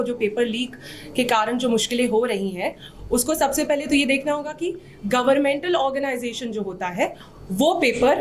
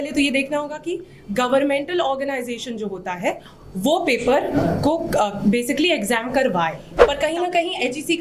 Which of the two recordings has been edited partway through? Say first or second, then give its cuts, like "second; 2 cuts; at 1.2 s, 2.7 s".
second; 1 cut; at 6.9 s